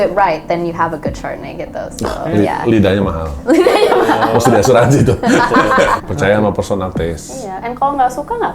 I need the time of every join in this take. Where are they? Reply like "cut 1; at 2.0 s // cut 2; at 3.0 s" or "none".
cut 1; at 6.0 s